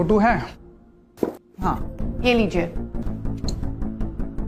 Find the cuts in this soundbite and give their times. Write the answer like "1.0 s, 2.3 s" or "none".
1.9 s, 3.1 s